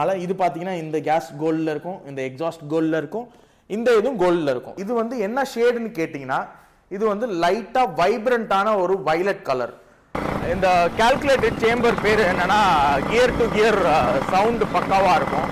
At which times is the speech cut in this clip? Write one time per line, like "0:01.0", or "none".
0:04.8
0:10.2